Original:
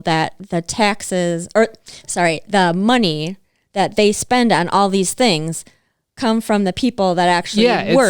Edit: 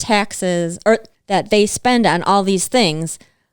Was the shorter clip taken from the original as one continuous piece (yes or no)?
no